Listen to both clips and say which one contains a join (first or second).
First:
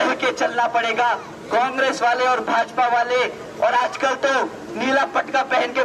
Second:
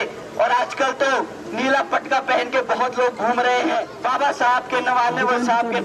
second